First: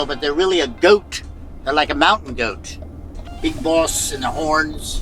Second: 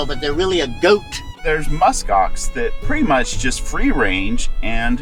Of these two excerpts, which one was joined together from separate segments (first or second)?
second